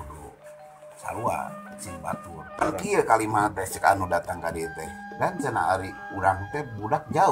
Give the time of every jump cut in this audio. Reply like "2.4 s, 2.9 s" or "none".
2.5 s